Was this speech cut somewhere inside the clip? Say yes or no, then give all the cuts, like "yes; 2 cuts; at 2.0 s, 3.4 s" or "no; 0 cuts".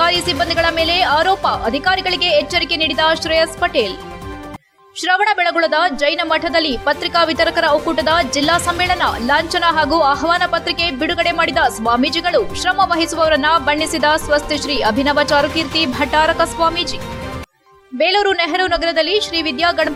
no; 0 cuts